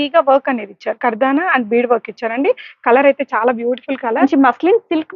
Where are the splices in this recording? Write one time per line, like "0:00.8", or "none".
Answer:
0:04.2